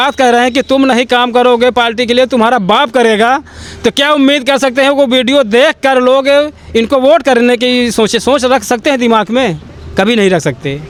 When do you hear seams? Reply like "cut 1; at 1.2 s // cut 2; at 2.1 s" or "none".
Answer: none